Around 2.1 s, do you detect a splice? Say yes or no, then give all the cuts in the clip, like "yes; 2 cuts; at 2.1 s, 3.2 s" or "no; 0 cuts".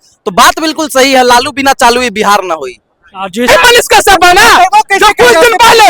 no; 1 cut; at 3.5 s